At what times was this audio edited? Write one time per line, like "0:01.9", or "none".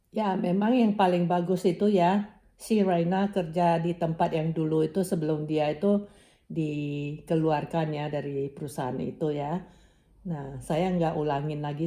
none